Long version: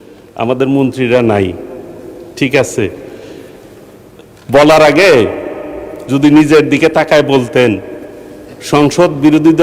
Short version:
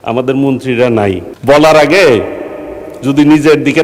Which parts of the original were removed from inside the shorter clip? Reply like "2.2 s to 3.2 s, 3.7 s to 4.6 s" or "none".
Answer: 1.6 s to 4.4 s